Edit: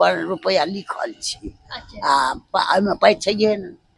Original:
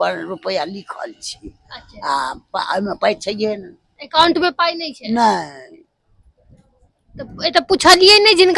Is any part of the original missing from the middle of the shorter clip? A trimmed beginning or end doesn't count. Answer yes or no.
no